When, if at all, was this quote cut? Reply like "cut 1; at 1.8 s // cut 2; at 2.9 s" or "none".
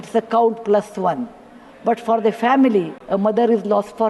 cut 1; at 3.0 s